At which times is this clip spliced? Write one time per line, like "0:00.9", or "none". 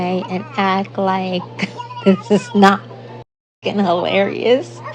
0:03.6